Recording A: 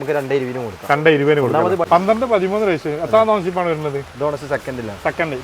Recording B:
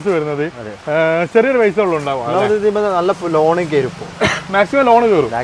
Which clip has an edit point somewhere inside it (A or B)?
A